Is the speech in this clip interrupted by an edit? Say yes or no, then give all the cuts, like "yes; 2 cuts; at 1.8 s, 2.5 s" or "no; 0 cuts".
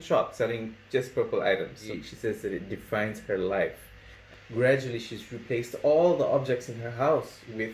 yes; 2 cuts; at 1.8 s, 4.2 s